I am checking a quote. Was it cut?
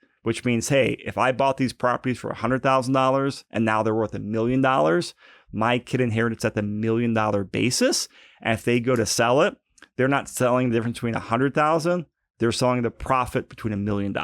yes; 1 cut; at 13.0 s

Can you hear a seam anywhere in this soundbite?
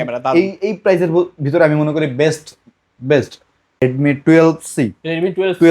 yes; 1 cut; at 3.8 s

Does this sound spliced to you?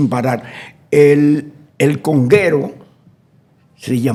no; 0 cuts

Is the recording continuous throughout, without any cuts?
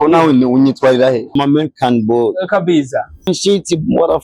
no; 2 cuts; at 1.3 s, 3.3 s

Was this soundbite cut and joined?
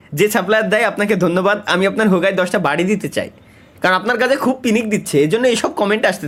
no; 0 cuts

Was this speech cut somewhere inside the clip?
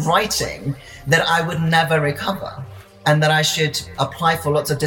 yes; 1 cut; at 3.0 s

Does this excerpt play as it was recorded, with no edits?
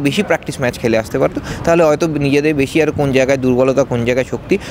yes; 0 cuts

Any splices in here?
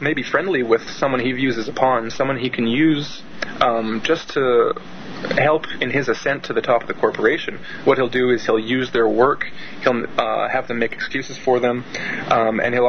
no; 0 cuts

